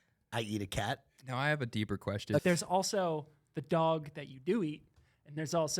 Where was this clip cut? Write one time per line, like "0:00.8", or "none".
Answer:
0:01.1
0:02.4